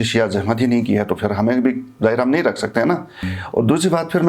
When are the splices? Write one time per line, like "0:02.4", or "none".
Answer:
0:03.2